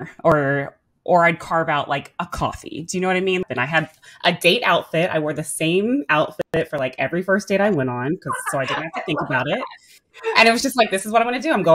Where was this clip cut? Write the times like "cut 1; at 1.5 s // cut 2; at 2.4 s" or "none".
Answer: cut 1; at 3.4 s

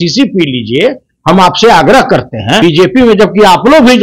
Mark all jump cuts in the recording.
cut 1; at 2.6 s

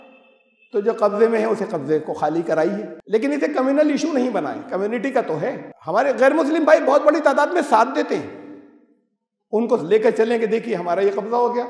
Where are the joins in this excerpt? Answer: cut 1; at 2.9 s

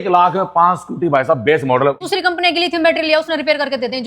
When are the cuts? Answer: cut 1; at 2.0 s

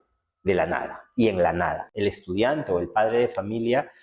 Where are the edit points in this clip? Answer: cut 1; at 1.8 s

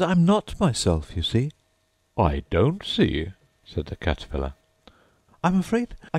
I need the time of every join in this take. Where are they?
cut 1; at 1.6 s

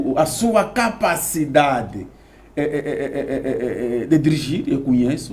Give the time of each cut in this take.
none

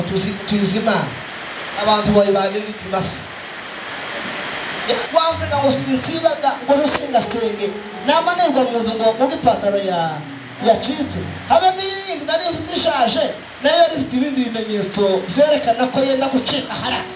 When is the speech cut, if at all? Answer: cut 1; at 5.1 s

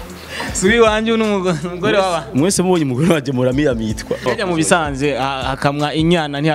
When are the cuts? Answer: cut 1; at 4.2 s

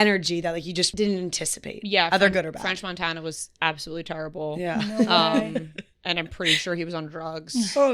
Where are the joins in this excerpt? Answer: cut 1; at 0.9 s

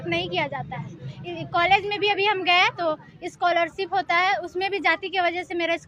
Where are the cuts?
none

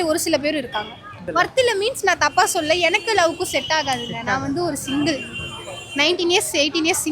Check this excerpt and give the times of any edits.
cut 1; at 1.2 s

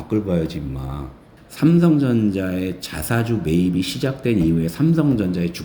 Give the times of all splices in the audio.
cut 1; at 1.2 s

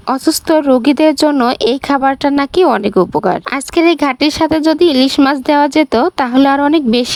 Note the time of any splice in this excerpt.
none

